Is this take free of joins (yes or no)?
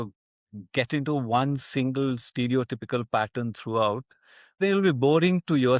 no